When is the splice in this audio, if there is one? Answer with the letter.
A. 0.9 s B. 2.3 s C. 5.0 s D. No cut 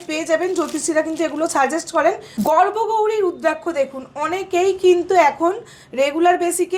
B